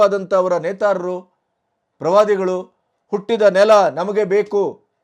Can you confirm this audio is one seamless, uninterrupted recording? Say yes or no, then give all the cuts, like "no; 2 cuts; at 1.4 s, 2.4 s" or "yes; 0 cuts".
yes; 0 cuts